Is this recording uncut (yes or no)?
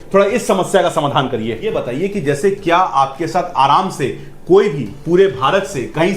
no